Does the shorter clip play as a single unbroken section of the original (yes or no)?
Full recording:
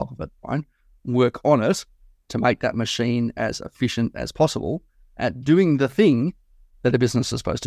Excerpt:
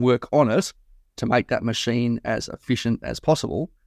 yes